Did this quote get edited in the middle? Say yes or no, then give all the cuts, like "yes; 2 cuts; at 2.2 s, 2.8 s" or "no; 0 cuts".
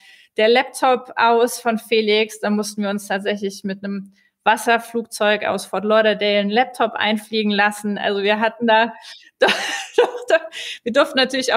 no; 0 cuts